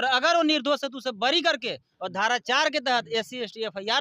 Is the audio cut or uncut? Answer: uncut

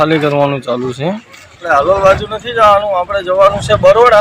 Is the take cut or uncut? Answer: cut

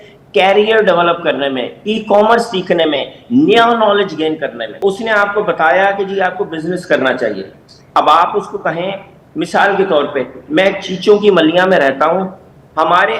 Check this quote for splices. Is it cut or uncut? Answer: cut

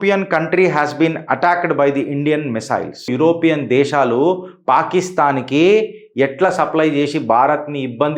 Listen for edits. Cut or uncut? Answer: cut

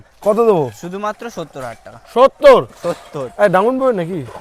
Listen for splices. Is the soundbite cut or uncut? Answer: uncut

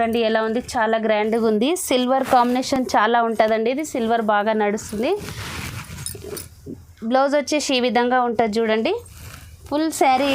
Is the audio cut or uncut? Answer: uncut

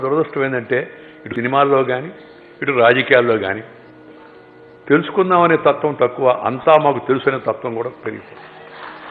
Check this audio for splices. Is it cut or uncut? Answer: cut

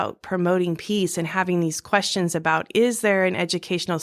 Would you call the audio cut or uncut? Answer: uncut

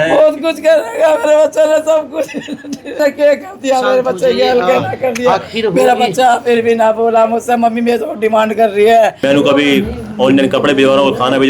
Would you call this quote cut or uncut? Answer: cut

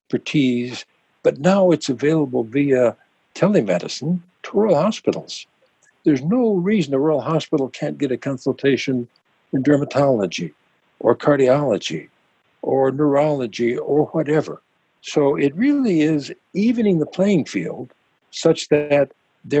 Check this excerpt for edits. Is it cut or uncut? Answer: uncut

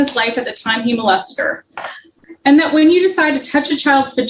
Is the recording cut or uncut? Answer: cut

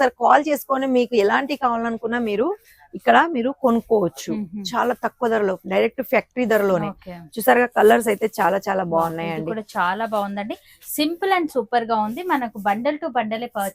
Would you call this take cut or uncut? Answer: uncut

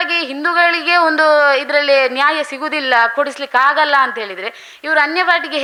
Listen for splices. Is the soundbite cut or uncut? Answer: uncut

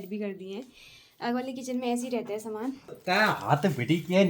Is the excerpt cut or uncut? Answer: cut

